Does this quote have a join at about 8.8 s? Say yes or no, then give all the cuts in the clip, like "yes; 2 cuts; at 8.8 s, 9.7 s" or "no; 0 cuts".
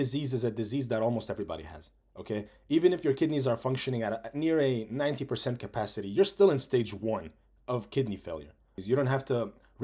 yes; 1 cut; at 8.8 s